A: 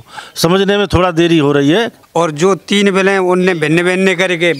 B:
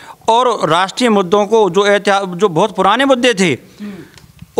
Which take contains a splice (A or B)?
A